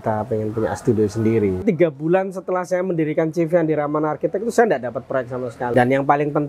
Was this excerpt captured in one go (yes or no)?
no